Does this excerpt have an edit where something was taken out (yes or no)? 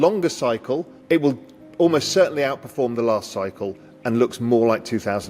yes